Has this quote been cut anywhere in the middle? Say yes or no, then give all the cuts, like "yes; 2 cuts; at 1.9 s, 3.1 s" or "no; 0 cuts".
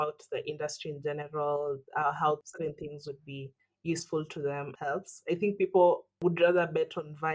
yes; 3 cuts; at 2.5 s, 4.7 s, 6.2 s